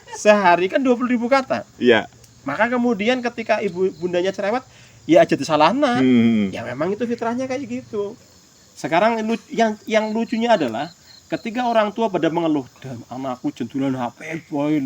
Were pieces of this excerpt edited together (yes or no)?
yes